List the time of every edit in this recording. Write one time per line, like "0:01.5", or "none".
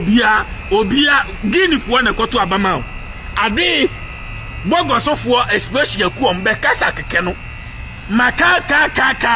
none